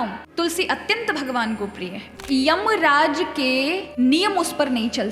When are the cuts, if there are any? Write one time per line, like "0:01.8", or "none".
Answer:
0:02.1
0:03.9